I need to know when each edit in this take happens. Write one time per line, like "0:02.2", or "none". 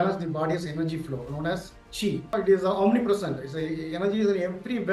0:02.3